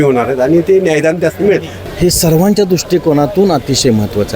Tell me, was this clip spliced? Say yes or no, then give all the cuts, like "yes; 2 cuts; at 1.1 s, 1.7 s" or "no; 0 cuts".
yes; 1 cut; at 1.8 s